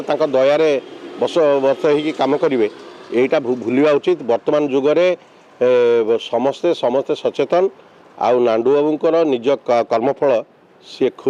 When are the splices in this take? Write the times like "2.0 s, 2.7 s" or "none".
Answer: none

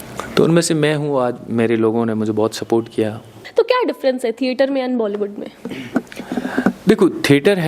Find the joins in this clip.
3.4 s

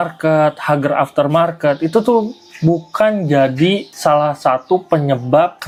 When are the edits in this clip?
none

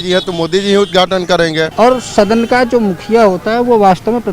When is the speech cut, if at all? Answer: 1.7 s

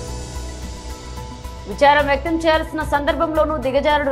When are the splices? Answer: 1.6 s

